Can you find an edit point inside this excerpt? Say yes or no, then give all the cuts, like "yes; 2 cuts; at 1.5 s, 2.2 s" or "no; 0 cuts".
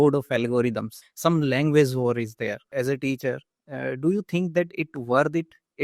yes; 2 cuts; at 1.0 s, 2.7 s